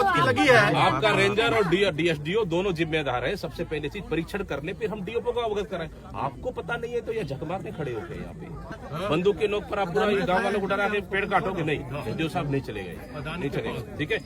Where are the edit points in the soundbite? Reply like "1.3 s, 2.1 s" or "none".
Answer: 8.7 s